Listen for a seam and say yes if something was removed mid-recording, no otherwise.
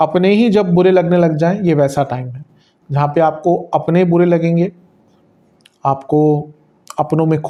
no